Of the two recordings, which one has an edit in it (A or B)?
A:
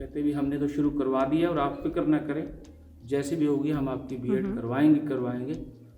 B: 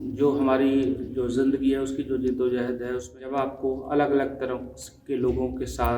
B